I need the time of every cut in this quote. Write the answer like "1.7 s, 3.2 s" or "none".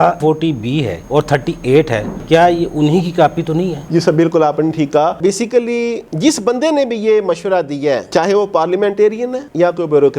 none